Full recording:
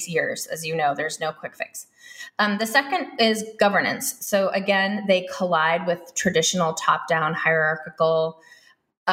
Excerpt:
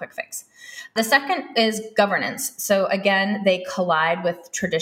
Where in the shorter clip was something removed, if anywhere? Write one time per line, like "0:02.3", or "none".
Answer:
0:00.9